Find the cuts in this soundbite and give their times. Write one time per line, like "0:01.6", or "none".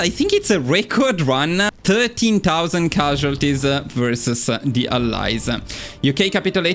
0:01.7